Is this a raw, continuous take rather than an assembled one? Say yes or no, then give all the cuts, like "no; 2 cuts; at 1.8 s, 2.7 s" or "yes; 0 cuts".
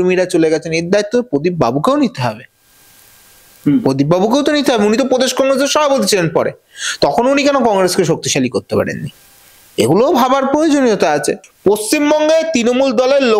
no; 1 cut; at 11.4 s